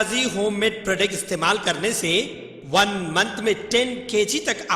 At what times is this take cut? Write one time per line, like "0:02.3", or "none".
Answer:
none